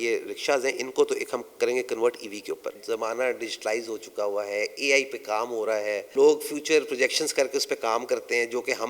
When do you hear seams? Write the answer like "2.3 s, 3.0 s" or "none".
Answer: 2.8 s, 6.1 s